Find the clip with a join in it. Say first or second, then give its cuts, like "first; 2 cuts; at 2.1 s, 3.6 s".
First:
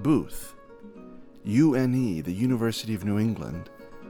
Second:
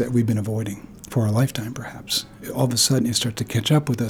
second; 2 cuts; at 0.9 s, 2.4 s